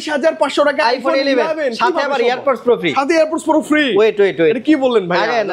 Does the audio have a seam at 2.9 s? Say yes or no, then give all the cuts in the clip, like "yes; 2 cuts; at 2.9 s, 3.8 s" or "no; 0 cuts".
no; 0 cuts